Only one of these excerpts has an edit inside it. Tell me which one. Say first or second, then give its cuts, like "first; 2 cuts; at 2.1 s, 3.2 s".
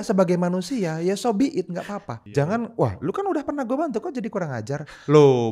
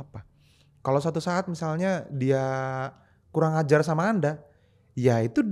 first; 1 cut; at 2.2 s